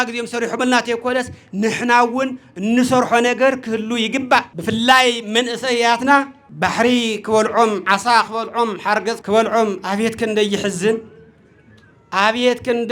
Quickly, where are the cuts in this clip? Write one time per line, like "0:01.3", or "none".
0:04.5
0:06.4
0:09.2